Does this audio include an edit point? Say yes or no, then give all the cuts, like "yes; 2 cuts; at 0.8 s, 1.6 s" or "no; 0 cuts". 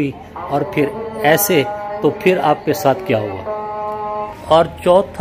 yes; 1 cut; at 4.3 s